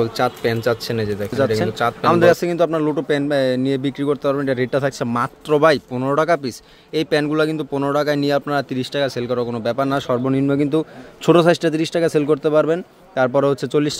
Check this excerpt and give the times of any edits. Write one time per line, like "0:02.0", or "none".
0:02.0